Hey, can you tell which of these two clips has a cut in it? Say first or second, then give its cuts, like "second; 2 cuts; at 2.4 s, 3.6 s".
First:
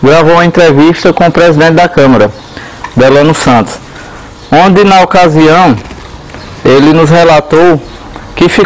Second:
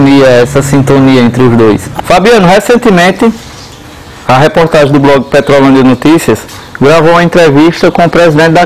second; 1 cut; at 1.9 s